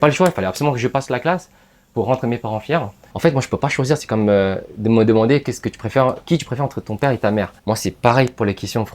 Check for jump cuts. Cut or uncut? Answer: cut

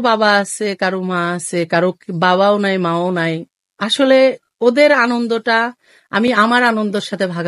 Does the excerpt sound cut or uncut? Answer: uncut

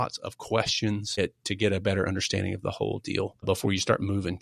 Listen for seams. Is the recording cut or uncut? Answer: cut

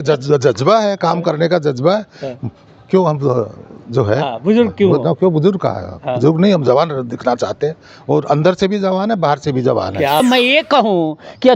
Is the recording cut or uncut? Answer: cut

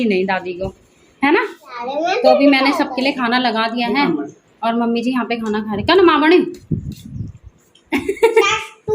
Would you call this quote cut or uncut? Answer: cut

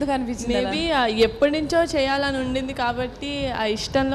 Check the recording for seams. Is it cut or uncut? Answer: uncut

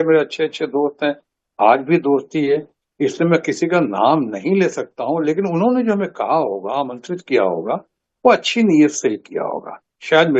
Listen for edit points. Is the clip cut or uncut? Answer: uncut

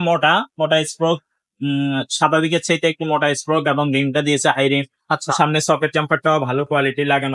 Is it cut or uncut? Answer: uncut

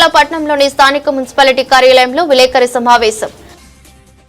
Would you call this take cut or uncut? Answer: uncut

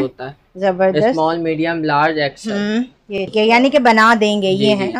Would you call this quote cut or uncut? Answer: cut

